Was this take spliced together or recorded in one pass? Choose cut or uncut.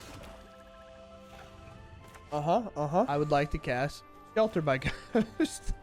cut